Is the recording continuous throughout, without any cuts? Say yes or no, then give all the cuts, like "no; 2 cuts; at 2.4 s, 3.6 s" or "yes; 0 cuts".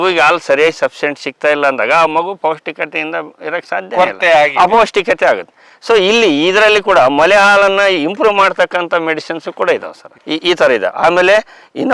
yes; 0 cuts